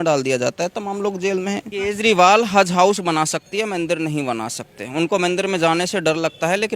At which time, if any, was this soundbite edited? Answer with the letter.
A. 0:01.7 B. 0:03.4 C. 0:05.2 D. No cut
A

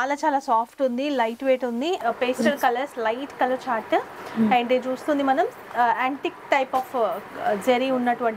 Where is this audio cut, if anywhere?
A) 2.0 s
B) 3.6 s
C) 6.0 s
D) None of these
A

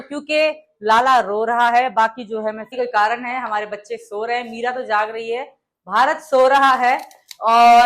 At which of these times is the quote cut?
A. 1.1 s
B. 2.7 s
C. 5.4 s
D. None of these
B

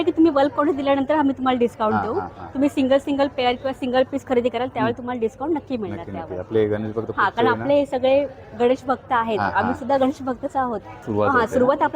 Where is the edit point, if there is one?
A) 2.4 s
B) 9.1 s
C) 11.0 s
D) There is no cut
C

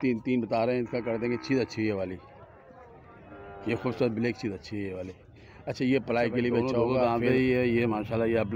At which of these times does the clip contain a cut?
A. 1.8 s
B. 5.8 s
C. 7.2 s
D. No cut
C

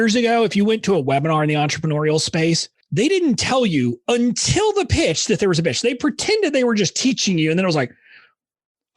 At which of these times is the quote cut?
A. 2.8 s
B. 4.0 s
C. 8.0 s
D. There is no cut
A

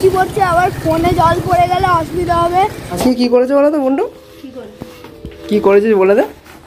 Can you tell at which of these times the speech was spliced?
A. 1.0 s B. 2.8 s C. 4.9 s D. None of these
B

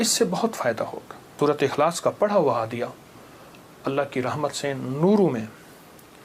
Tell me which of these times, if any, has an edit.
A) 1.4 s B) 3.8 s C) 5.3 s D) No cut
A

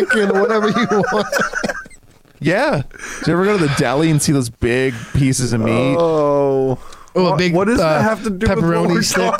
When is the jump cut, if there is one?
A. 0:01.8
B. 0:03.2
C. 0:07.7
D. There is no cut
B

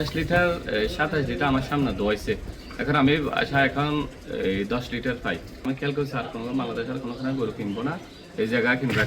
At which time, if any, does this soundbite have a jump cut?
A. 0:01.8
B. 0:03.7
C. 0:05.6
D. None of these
C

